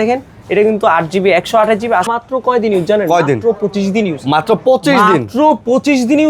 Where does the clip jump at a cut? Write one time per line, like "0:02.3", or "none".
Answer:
0:02.1